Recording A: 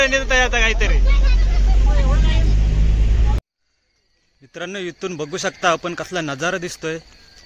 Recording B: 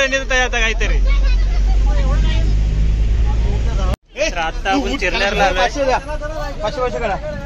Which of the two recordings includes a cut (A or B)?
A